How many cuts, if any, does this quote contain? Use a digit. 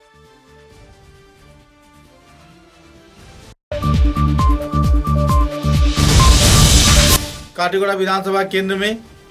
2